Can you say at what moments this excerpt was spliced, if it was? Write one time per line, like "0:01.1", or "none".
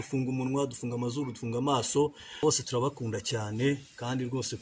0:02.4